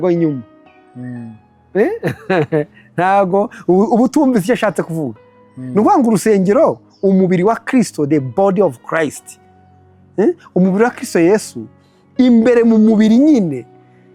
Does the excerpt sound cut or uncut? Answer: uncut